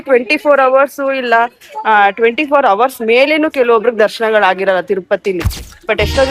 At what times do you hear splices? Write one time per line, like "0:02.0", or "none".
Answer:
none

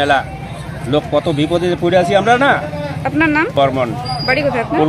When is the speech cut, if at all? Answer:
0:03.5

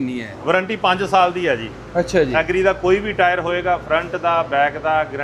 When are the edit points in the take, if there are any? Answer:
none

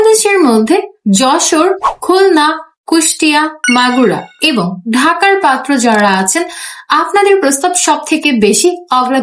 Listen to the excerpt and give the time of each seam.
none

